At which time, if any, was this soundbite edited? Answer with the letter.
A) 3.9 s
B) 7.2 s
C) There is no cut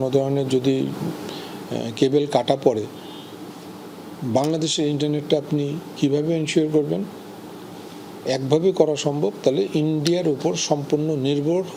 C